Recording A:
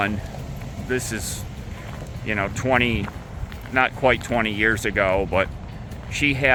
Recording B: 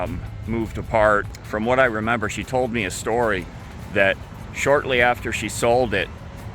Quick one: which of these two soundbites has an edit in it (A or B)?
B